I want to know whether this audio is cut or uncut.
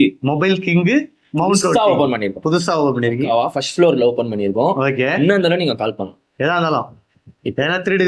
uncut